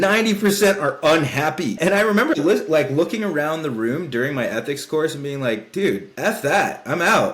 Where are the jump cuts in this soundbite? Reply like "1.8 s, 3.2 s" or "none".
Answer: 1.8 s, 6.1 s